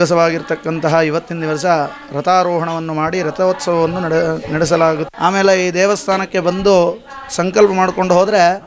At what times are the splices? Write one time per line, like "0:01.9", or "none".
0:05.1